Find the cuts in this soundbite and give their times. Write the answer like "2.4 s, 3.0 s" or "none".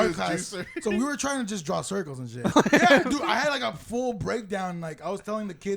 2.5 s